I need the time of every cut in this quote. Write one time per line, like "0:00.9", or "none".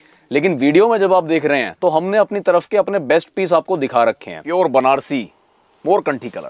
0:04.5